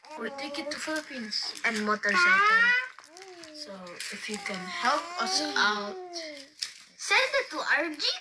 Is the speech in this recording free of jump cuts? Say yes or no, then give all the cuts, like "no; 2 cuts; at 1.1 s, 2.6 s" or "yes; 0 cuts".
yes; 0 cuts